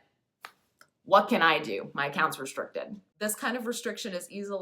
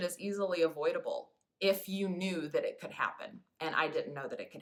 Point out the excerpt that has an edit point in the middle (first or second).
first